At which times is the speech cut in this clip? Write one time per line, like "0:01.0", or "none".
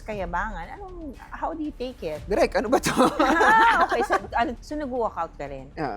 0:04.6